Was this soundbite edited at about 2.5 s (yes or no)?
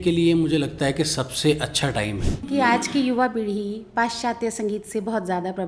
yes